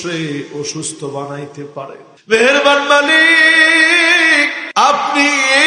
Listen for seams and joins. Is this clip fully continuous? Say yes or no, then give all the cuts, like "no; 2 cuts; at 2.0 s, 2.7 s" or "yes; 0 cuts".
no; 2 cuts; at 2.1 s, 4.6 s